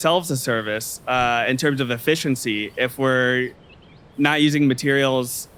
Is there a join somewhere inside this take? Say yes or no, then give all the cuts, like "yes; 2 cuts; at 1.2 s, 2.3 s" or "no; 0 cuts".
no; 0 cuts